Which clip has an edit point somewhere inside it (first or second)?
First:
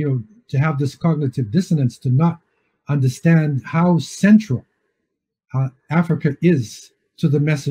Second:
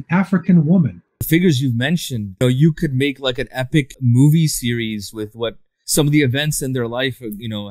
second